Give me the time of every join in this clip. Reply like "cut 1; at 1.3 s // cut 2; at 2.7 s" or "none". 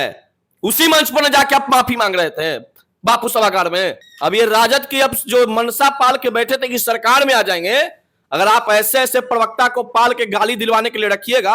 cut 1; at 4.1 s